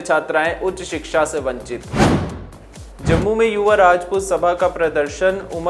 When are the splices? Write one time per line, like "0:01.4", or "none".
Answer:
0:01.6
0:02.9